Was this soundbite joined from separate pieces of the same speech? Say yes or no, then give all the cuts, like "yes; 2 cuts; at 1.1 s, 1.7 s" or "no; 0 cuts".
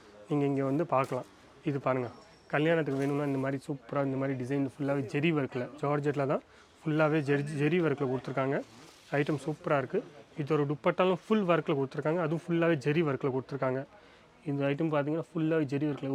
no; 0 cuts